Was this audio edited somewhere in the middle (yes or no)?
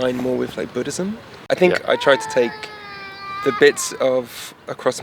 yes